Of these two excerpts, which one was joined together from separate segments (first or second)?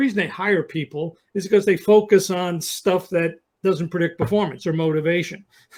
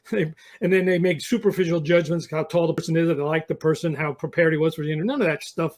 second